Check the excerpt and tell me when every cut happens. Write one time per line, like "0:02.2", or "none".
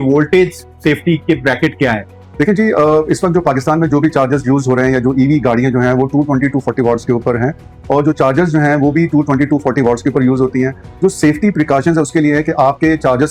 none